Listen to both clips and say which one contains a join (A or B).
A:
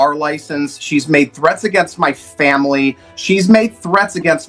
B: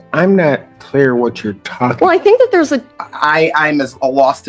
B